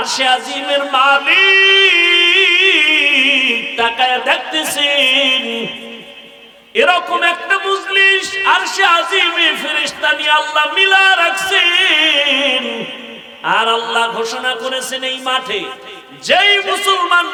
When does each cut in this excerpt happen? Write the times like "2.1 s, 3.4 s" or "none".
none